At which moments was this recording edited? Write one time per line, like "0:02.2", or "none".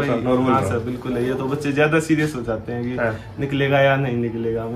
none